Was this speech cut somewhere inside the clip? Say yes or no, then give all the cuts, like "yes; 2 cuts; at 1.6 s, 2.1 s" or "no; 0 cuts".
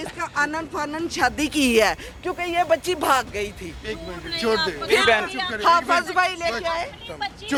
no; 0 cuts